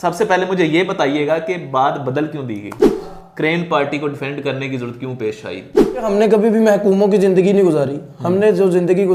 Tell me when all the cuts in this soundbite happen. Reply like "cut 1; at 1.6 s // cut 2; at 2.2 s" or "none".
cut 1; at 3.0 s // cut 2; at 6.1 s

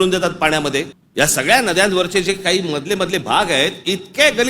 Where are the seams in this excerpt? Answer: cut 1; at 1.0 s

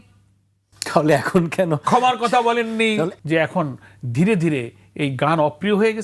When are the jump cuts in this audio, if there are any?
cut 1; at 3.1 s

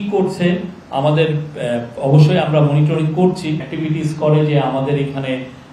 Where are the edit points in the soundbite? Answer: cut 1; at 3.6 s

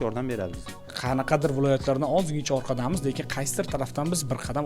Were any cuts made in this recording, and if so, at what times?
cut 1; at 0.9 s

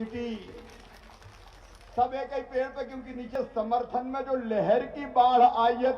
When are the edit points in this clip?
cut 1; at 3.3 s

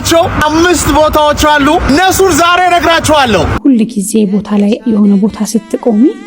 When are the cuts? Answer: cut 1; at 3.5 s

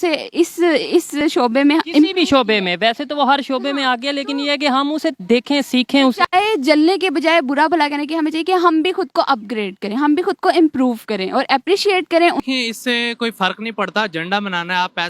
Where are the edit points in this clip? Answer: cut 1; at 1.2 s // cut 2; at 12.4 s

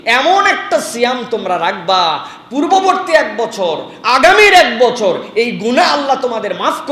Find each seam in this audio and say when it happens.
none

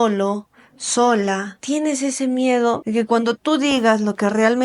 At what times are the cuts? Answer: cut 1; at 1.5 s // cut 2; at 2.8 s

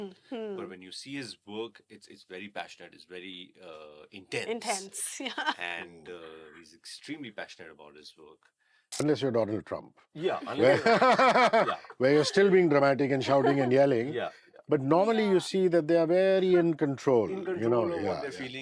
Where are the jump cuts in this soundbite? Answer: cut 1; at 9.0 s

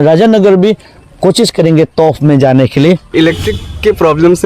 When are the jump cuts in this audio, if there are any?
cut 1; at 3.1 s

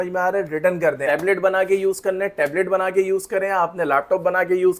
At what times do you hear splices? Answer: cut 1; at 1.0 s

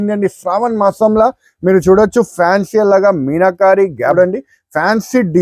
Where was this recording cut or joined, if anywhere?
cut 1; at 4.1 s

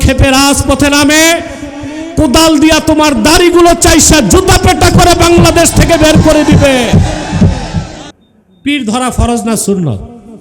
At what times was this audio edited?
cut 1; at 8.0 s

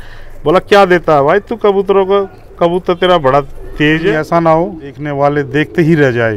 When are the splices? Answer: cut 1; at 4.1 s // cut 2; at 5.0 s

